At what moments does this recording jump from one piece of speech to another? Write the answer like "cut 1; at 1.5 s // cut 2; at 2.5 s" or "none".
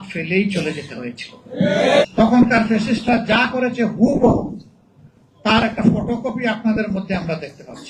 cut 1; at 2.0 s